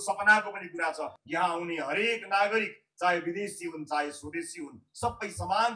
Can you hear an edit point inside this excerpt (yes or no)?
yes